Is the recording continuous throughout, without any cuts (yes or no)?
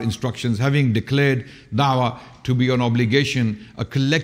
yes